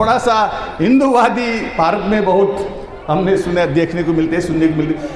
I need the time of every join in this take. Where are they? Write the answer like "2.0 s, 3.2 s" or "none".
none